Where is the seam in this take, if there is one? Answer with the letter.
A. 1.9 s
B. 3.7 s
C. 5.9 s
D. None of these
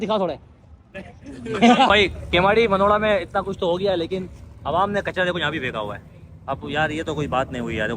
A